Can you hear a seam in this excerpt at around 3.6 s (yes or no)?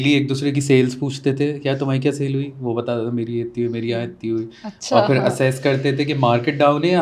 no